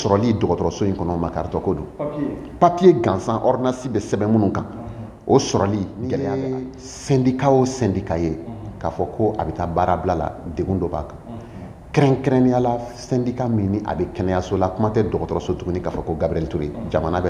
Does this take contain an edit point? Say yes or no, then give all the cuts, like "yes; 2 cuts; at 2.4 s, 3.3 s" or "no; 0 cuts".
yes; 1 cut; at 6.3 s